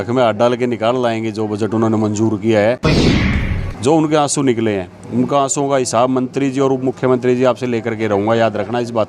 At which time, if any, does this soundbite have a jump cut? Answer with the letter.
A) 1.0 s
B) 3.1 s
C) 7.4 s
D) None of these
B